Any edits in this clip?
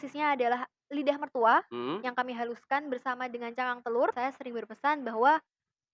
yes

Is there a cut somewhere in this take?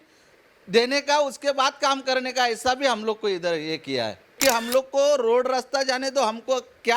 yes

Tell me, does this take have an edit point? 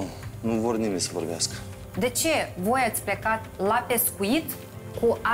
no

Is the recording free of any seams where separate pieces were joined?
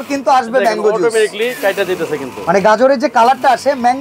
yes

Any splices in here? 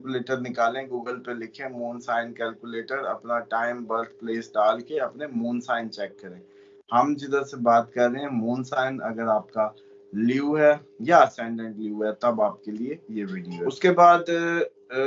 yes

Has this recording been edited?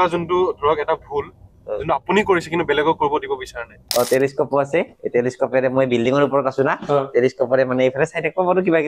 yes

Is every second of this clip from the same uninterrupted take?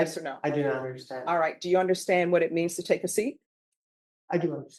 yes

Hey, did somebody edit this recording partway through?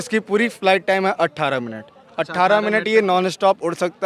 no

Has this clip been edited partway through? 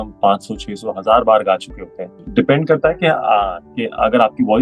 yes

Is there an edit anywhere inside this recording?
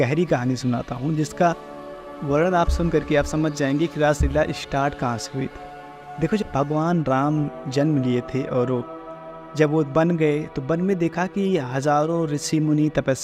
no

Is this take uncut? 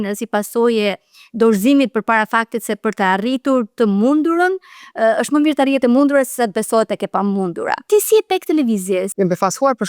no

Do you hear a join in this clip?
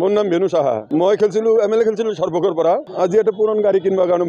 no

